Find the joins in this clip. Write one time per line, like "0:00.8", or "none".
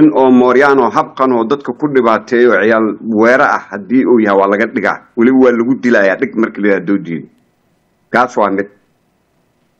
none